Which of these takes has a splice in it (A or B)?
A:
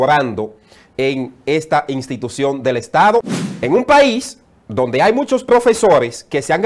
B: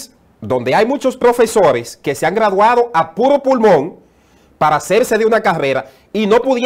A